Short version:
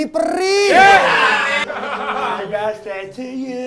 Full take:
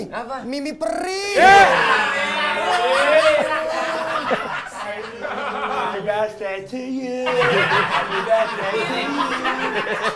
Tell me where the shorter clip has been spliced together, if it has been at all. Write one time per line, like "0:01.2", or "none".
0:01.6